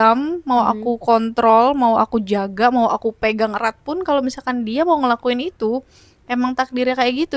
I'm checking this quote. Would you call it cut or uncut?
uncut